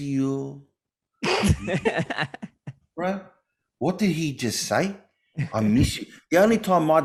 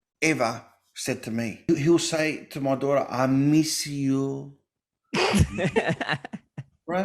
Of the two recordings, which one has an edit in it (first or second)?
second